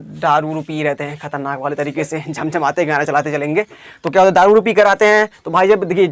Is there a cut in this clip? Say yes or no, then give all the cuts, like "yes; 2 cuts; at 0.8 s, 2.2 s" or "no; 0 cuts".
no; 0 cuts